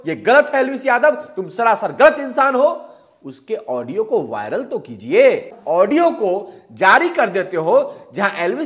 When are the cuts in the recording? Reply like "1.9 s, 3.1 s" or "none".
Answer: 5.5 s